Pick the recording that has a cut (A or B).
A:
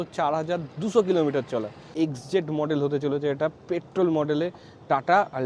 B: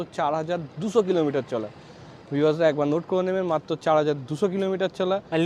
A